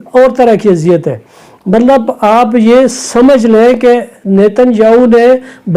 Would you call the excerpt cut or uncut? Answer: uncut